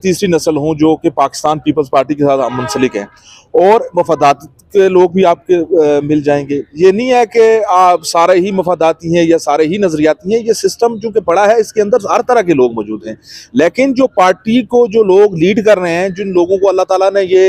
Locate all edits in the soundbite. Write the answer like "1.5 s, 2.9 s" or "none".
none